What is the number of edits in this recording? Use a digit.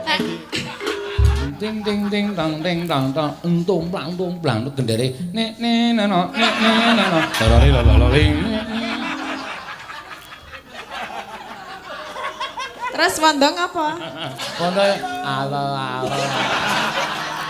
1